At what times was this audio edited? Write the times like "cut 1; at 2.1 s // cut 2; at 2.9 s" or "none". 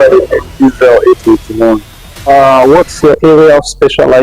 cut 1; at 2.3 s